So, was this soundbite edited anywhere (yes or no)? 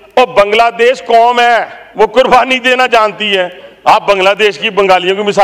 yes